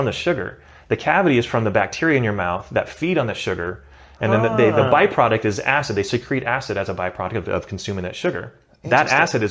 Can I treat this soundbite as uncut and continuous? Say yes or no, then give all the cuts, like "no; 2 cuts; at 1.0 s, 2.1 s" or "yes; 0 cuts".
yes; 0 cuts